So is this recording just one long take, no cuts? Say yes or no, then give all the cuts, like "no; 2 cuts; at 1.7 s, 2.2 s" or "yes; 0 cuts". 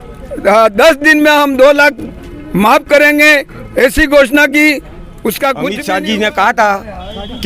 no; 1 cut; at 5.8 s